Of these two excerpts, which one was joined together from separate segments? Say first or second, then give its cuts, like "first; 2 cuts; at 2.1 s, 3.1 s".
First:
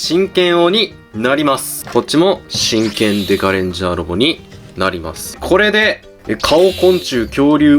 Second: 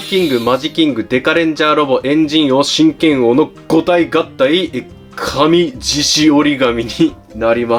first; 2 cuts; at 1.7 s, 5.4 s